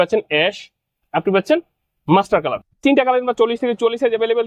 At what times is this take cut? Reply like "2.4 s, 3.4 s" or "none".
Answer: none